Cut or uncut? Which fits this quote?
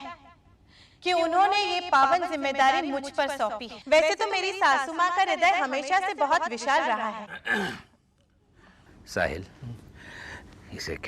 cut